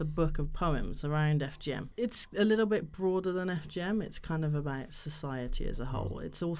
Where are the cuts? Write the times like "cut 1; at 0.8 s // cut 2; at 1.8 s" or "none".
cut 1; at 1.9 s